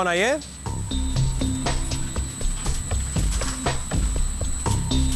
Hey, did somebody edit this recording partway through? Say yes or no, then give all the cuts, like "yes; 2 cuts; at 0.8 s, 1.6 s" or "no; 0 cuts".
no; 0 cuts